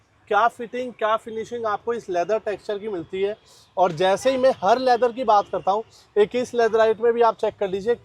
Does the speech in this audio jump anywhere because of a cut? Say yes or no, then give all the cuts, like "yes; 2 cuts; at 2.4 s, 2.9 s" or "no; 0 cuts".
no; 0 cuts